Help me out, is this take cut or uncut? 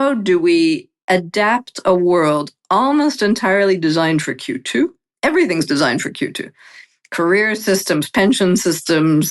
cut